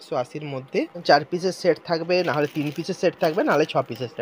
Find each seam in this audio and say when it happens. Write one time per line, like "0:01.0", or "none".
0:01.0